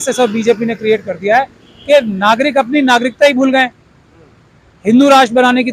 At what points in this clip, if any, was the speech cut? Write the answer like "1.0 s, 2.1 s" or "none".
none